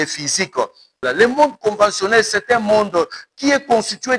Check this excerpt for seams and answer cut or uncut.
cut